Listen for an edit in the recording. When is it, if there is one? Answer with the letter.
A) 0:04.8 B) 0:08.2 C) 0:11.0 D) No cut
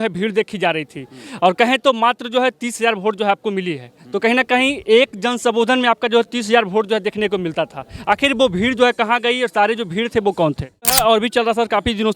C